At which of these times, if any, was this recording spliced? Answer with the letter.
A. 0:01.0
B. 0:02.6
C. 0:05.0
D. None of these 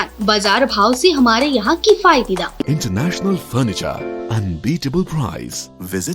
B